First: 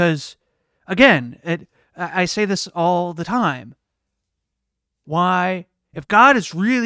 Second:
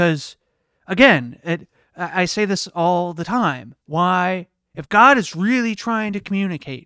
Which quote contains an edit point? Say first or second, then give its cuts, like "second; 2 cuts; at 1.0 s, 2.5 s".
second; 1 cut; at 3.7 s